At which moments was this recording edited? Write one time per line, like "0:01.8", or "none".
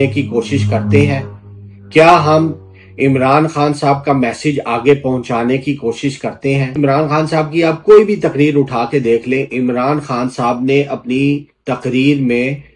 0:06.7

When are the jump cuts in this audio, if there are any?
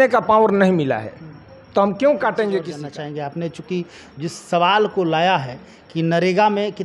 0:02.8

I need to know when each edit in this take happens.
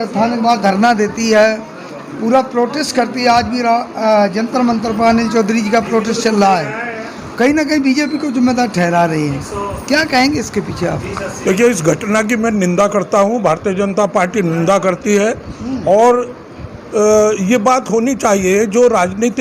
none

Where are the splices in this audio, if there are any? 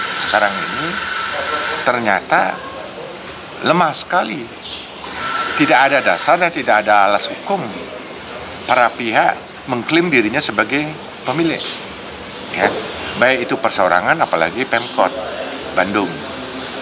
none

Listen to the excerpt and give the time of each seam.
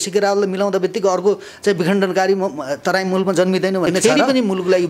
0:04.0

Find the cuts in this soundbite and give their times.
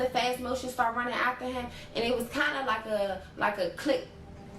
none

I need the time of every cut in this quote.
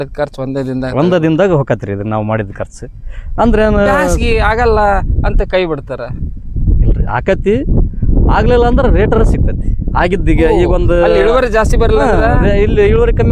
none

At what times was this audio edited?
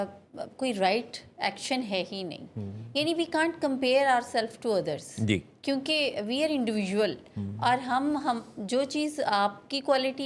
none

